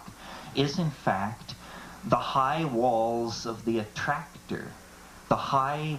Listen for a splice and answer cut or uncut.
uncut